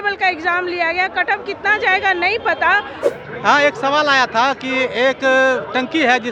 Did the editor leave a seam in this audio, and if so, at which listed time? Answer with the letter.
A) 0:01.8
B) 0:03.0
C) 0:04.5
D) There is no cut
B